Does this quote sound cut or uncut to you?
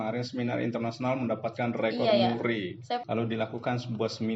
cut